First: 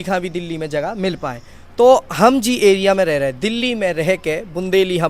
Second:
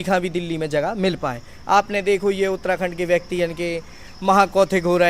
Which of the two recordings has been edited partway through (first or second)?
first